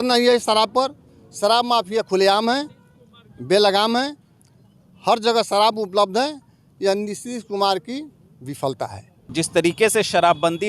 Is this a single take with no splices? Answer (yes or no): no